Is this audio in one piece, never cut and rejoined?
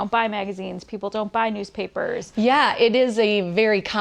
no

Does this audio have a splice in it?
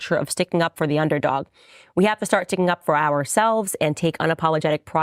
no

